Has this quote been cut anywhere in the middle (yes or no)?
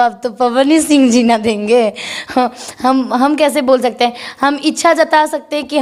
no